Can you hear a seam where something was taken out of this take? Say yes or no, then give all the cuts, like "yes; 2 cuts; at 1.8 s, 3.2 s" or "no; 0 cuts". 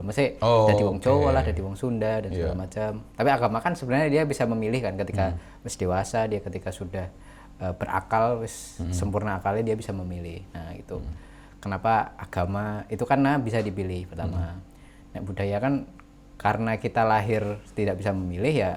no; 0 cuts